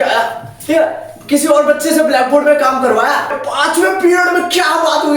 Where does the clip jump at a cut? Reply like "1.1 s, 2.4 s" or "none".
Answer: 3.4 s